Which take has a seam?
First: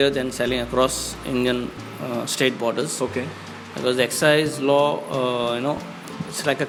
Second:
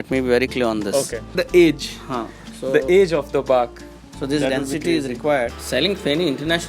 second; 2 cuts; at 1.4 s, 5.6 s

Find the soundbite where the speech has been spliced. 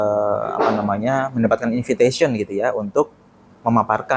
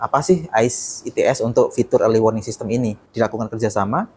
second; 1 cut; at 3.0 s

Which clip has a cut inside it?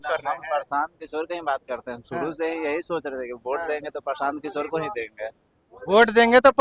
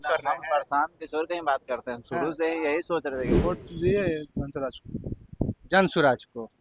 second; 1 cut; at 3.4 s

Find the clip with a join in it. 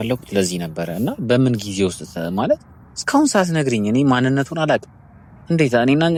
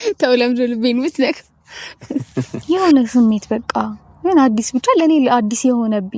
second; 1 cut; at 2.6 s

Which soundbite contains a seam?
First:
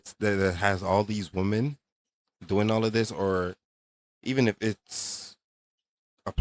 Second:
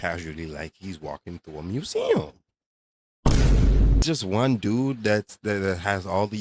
second; 1 cut; at 4.0 s

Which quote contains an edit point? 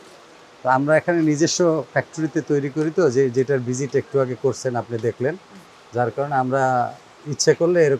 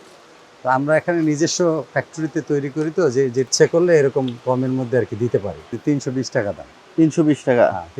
second; 2 cuts; at 3.5 s, 5.7 s

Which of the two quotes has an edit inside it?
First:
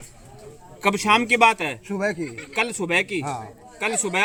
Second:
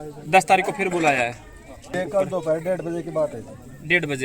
second; 1 cut; at 1.9 s

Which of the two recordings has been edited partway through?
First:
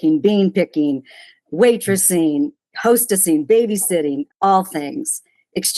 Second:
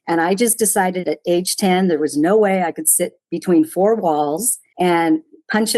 first; 1 cut; at 4.3 s

